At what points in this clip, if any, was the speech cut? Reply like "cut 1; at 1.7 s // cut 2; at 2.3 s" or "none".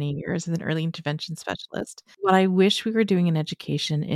cut 1; at 2.0 s